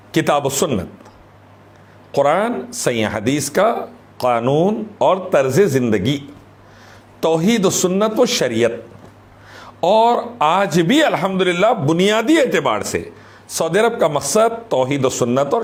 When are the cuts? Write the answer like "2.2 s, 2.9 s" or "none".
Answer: none